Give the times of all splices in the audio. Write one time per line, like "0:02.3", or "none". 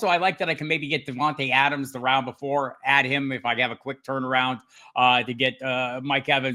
none